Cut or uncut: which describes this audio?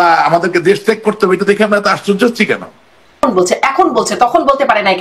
cut